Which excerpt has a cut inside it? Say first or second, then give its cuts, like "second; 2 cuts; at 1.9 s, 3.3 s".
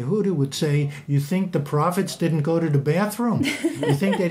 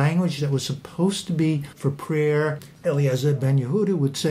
second; 2 cuts; at 1.7 s, 2.6 s